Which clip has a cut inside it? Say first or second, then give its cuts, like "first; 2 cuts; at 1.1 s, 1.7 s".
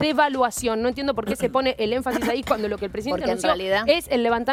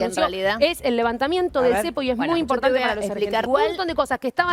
second; 1 cut; at 3.5 s